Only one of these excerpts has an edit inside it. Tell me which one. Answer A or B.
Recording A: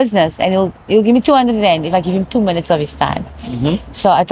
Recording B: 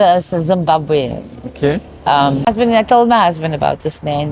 B